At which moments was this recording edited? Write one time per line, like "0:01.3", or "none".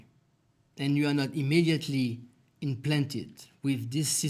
none